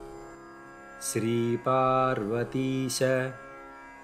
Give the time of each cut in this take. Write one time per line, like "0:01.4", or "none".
0:01.1
0:03.3